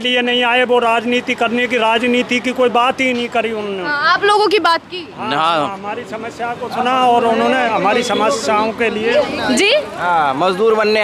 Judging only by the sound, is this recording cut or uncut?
uncut